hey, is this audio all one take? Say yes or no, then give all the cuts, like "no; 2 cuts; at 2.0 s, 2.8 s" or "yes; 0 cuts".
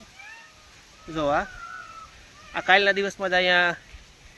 yes; 0 cuts